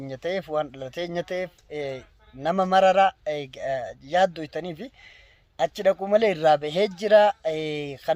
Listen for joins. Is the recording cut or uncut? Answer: uncut